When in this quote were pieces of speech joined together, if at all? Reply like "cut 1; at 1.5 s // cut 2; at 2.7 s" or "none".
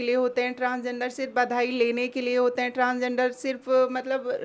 none